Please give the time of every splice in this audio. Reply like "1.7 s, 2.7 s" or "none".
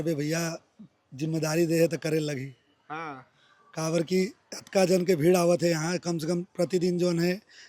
none